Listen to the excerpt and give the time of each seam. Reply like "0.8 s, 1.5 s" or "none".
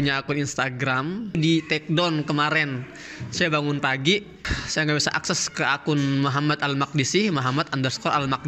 1.4 s